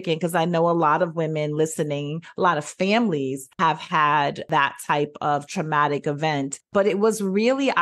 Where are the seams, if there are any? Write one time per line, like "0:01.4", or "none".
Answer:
0:03.5
0:04.4
0:06.7